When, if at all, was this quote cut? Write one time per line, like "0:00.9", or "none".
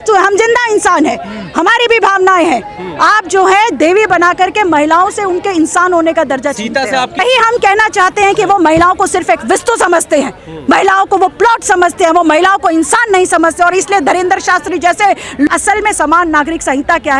0:07.2
0:15.5